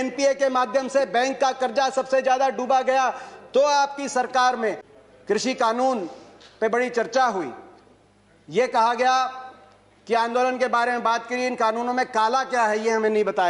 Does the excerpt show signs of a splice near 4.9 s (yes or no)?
yes